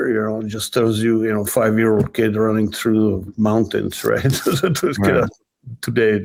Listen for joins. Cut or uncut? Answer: uncut